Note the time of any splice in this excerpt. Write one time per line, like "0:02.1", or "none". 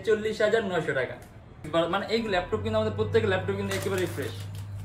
0:01.6